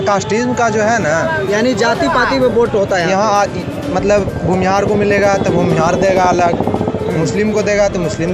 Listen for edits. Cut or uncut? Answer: uncut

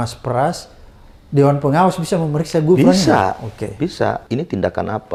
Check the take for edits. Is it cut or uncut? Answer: uncut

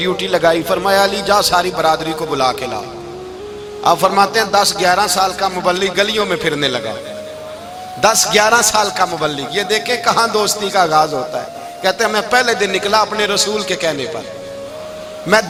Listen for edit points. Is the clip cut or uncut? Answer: uncut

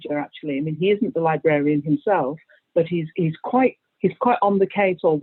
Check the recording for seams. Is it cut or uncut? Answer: uncut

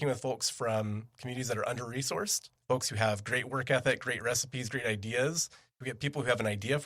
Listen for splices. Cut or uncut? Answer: cut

